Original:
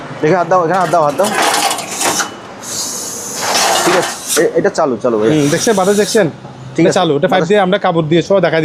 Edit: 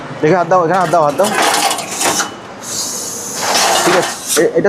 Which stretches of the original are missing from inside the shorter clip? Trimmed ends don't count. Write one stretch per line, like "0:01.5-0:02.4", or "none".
none

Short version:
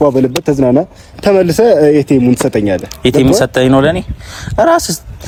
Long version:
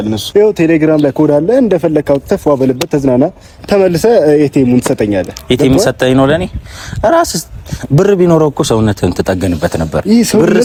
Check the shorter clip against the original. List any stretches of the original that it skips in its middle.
none

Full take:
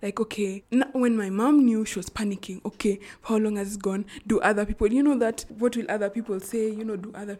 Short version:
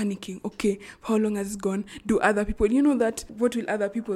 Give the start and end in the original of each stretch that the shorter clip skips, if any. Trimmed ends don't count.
none

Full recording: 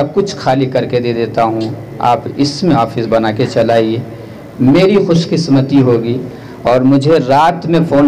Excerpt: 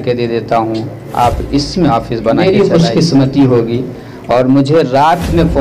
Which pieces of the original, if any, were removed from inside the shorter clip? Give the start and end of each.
0:03.2-0:04.7

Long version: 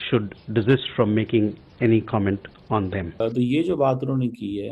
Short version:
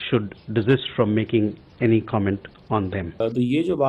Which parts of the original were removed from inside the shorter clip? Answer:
none

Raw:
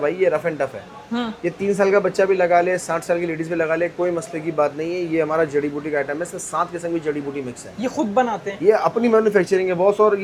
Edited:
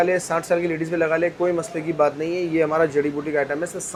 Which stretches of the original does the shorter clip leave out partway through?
none

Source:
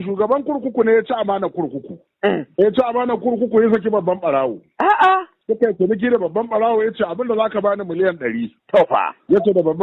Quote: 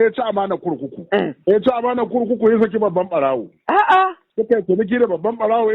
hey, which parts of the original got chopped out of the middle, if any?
0:01.8-0:02.0

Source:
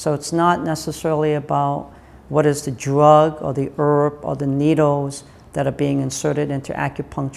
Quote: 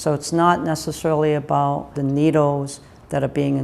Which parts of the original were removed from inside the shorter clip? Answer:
0:01.9-0:04.3

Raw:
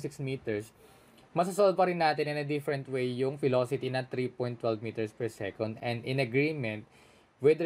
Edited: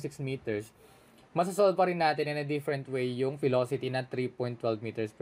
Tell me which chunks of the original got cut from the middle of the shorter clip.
none

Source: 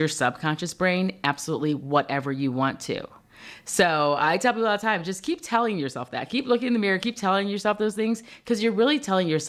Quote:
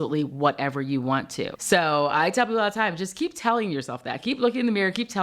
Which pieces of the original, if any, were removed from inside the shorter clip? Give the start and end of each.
0:03.1-0:03.6

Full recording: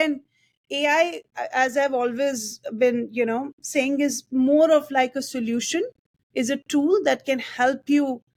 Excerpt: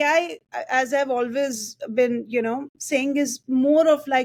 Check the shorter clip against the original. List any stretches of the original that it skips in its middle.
none

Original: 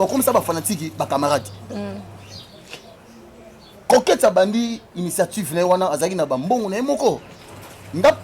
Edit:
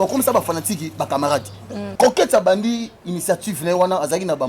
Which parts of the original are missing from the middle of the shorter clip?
0:01.9-0:03.8

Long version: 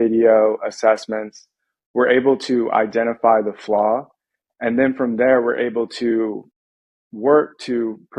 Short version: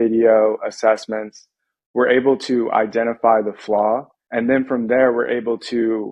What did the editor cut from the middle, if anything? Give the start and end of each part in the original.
0:04.2-0:04.5

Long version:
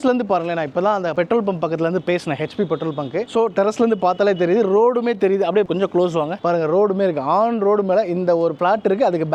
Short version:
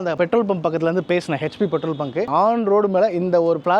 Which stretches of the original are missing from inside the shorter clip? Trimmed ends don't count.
0:03.3-0:07.2

